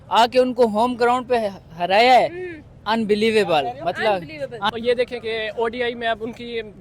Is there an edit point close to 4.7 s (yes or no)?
yes